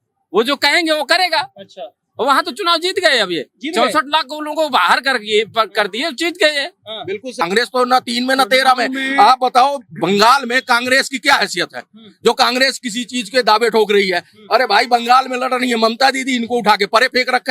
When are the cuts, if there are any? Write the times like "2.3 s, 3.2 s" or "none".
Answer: 7.4 s